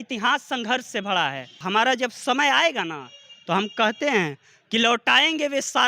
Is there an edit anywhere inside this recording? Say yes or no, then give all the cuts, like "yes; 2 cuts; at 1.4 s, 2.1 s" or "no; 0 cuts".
yes; 1 cut; at 1.6 s